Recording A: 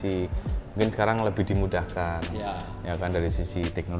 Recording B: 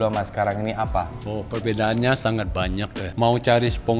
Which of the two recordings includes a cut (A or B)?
B